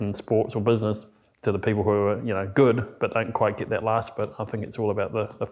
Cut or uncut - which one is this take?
uncut